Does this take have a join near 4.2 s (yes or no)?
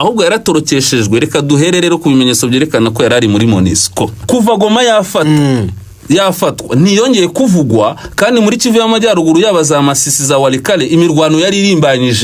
yes